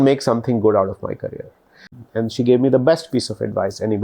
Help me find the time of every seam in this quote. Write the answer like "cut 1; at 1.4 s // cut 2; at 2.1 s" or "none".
cut 1; at 1.9 s